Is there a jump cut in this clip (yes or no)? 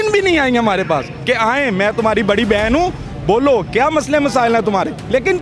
no